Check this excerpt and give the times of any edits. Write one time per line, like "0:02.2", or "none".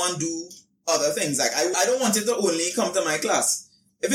0:01.7